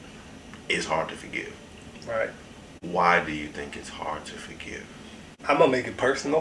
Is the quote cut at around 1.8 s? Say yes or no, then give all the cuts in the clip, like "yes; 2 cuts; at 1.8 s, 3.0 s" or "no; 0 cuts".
no; 1 cut; at 5.4 s